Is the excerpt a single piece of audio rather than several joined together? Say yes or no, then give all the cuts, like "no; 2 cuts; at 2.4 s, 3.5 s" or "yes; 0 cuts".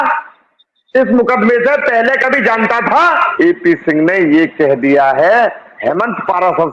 no; 2 cuts; at 3.3 s, 5.7 s